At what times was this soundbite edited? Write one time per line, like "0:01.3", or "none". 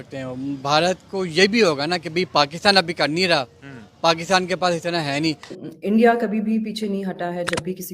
0:05.5